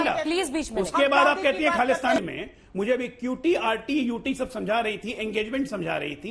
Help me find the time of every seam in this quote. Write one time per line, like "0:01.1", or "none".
0:02.2